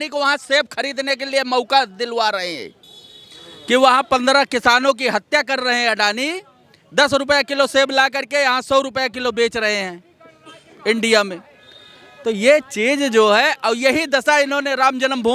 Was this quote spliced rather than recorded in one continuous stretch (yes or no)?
no